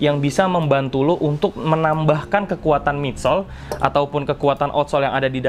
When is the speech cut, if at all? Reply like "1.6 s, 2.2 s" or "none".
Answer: none